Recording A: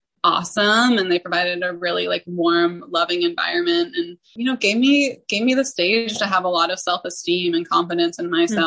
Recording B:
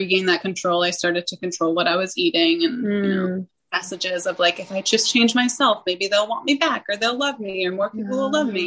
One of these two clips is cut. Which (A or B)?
A